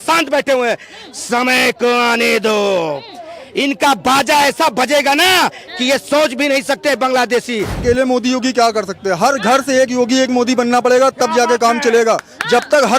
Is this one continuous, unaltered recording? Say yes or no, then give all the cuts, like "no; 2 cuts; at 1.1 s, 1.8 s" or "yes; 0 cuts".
no; 1 cut; at 7.8 s